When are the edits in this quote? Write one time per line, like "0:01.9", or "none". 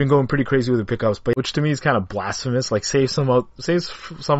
0:01.3